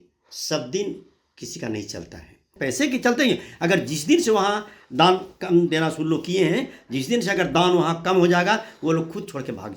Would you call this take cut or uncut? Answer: cut